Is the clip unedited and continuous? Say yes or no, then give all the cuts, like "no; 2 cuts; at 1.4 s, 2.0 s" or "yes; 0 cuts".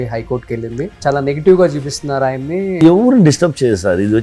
no; 2 cuts; at 1.0 s, 2.8 s